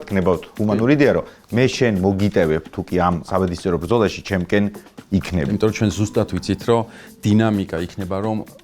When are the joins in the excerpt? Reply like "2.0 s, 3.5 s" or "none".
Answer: 3.2 s, 5.5 s